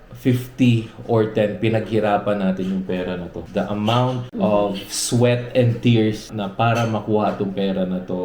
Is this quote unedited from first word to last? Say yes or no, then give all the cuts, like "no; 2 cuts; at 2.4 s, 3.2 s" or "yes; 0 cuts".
no; 3 cuts; at 3.4 s, 4.3 s, 6.3 s